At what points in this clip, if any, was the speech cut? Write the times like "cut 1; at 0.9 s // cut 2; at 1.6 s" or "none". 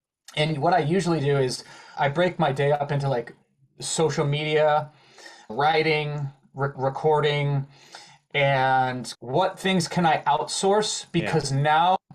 cut 1; at 1.8 s // cut 2; at 5.5 s // cut 3; at 6.8 s // cut 4; at 9.0 s

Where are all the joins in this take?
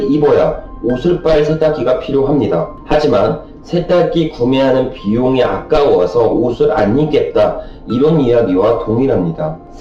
cut 1; at 2.7 s

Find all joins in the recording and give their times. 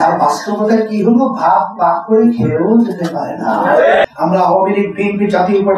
cut 1; at 4.0 s

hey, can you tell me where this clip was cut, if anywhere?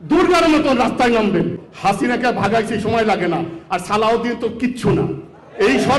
cut 1; at 1.6 s

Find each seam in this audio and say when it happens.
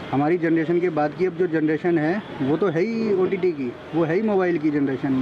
none

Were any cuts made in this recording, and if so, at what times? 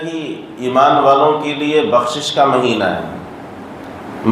none

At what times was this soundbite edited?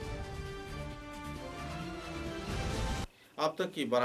none

